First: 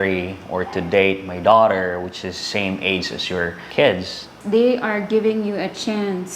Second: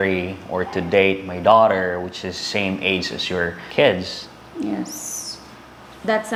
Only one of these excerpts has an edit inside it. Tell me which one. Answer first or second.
first